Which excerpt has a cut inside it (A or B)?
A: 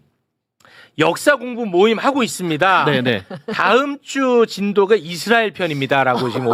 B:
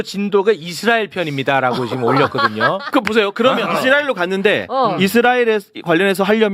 B